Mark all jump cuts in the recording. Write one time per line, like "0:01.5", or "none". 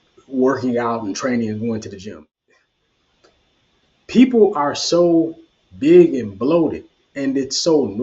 0:02.0

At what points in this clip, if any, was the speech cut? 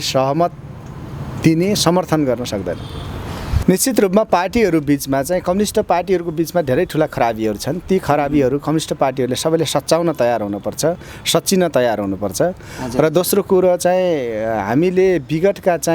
0:03.5

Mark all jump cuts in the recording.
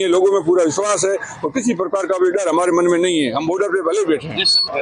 none

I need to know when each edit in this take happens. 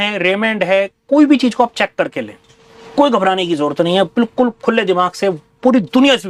none

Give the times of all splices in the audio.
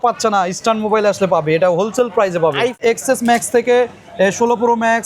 0:02.8

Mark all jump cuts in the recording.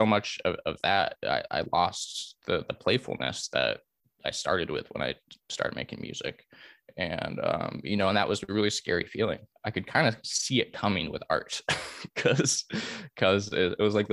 0:09.5

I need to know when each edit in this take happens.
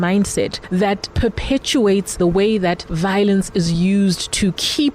0:02.2
0:02.9

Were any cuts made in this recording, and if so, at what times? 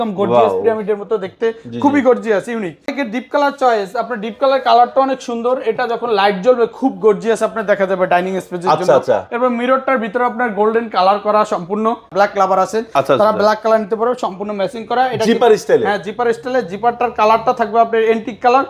0:03.0
0:12.1

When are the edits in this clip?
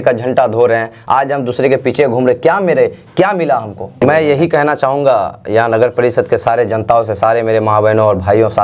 0:03.9

